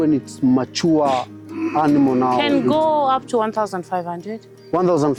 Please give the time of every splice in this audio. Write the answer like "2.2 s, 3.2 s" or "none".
none

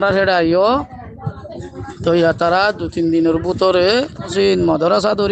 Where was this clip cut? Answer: 4.3 s

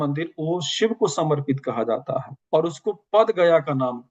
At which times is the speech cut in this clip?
none

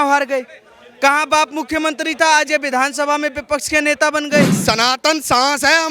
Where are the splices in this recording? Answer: 4.6 s

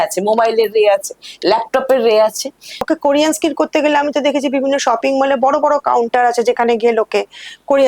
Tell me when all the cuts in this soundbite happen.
2.8 s

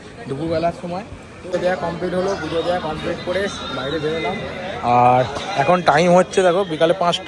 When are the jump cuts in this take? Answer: 1.5 s

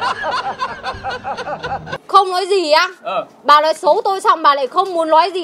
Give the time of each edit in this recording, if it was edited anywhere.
2.0 s

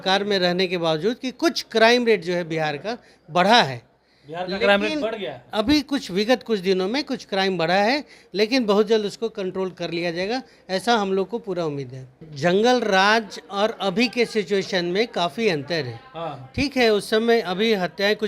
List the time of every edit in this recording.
12.3 s

